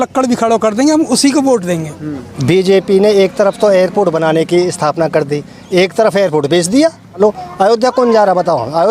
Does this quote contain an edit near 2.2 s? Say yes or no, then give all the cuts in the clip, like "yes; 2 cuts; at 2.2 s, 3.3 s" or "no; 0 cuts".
yes; 2 cuts; at 2.2 s, 7.2 s